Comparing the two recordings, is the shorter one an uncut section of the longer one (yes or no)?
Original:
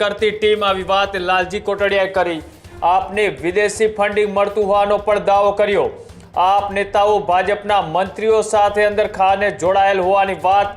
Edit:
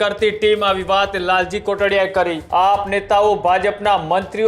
no